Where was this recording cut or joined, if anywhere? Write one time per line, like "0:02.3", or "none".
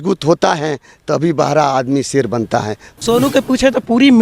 0:03.0